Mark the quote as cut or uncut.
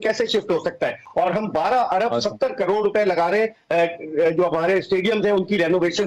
uncut